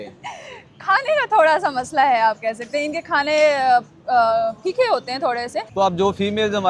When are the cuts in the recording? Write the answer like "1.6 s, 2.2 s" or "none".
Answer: 5.6 s